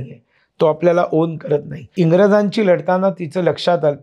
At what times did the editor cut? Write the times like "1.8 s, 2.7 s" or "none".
1.9 s